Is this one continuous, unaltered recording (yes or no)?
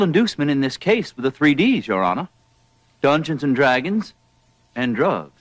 yes